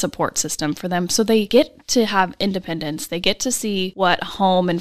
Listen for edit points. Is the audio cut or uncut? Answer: cut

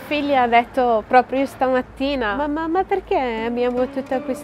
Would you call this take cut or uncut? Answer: uncut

